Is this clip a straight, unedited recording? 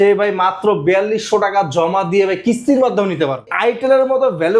no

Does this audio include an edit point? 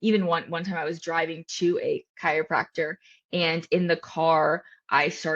no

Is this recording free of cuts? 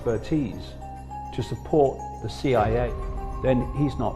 no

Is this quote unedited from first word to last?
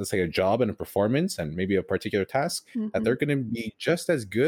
yes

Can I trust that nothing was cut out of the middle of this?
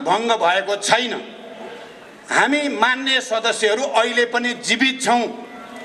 yes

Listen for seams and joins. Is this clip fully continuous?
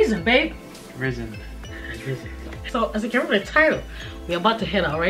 yes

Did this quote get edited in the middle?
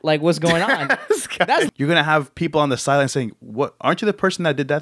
yes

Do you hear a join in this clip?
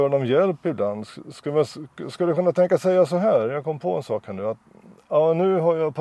no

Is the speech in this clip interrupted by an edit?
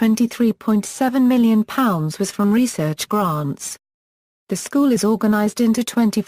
no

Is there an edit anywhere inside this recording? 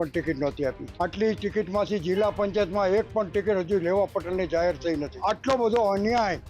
yes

